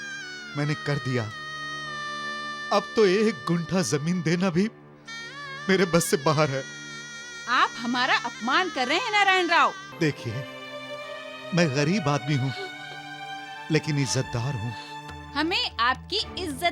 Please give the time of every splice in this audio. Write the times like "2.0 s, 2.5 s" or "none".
9.8 s